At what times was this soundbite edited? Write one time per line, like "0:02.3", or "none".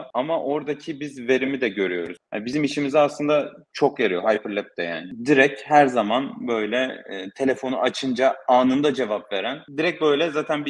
0:02.1
0:09.6